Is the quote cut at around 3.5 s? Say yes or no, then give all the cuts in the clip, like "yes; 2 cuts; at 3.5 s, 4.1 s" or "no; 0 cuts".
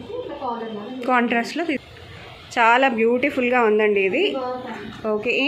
no; 1 cut; at 1.8 s